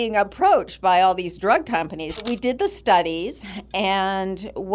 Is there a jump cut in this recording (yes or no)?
yes